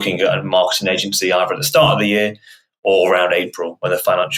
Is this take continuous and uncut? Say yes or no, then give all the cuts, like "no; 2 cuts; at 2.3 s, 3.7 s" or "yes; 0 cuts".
yes; 0 cuts